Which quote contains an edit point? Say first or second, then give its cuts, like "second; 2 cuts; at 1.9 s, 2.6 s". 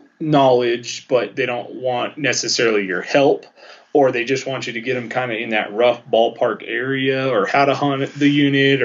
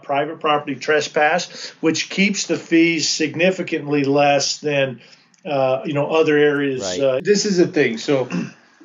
second; 1 cut; at 7.2 s